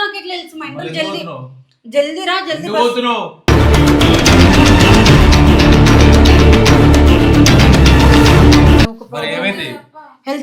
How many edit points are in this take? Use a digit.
1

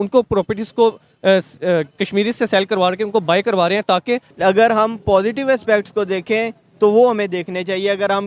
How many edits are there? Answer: 1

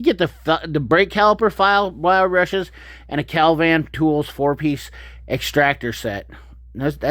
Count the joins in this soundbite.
0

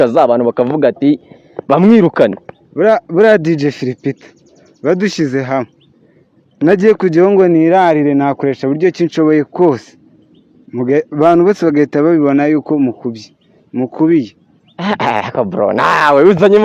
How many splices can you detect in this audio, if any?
0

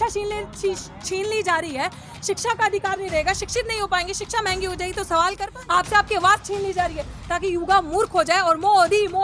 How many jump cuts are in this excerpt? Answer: 1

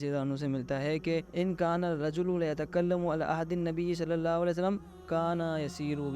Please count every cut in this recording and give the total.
1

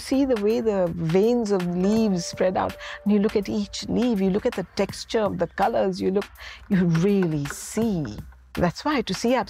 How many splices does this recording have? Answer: 1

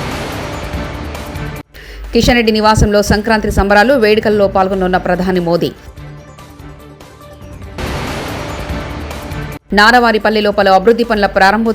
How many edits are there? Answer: 0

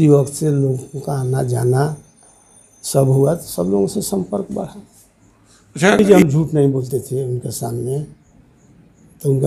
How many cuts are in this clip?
1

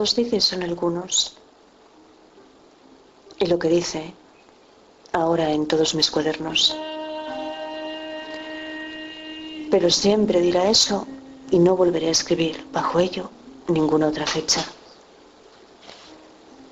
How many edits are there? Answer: 1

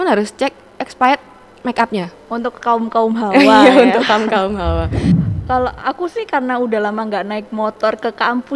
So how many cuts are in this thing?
1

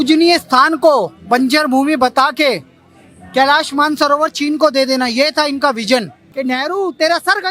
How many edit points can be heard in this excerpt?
1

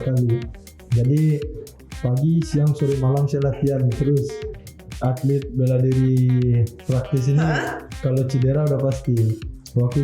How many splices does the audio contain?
1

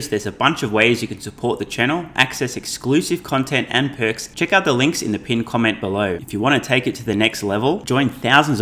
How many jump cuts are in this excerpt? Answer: 2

